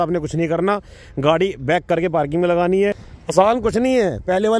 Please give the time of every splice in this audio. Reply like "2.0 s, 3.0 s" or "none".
3.1 s

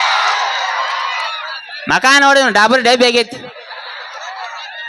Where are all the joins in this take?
1.3 s

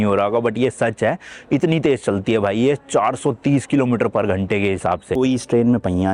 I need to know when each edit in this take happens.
5.1 s

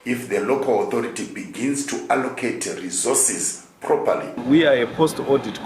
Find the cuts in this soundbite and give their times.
4.3 s

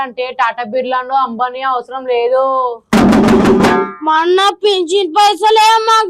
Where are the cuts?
none

